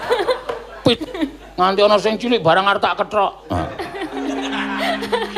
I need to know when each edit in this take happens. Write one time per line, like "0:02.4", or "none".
0:00.9